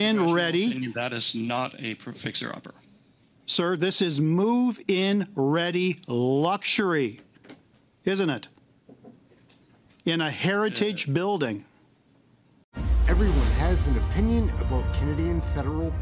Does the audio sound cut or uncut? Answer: cut